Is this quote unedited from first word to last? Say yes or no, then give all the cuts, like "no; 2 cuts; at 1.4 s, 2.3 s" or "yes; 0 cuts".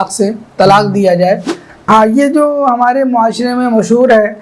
no; 1 cut; at 1.7 s